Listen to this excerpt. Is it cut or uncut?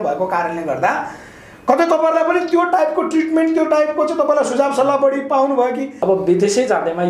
cut